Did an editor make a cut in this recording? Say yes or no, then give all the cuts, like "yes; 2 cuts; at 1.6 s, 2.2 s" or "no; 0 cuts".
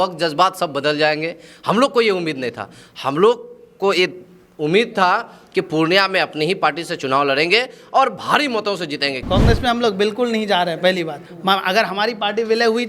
yes; 1 cut; at 9.2 s